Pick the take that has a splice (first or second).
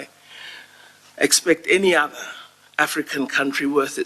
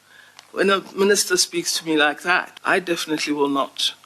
second